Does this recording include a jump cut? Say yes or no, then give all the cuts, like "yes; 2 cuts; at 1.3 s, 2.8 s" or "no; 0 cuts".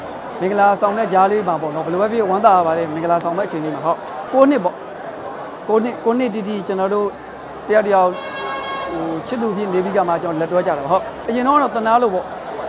yes; 1 cut; at 4.2 s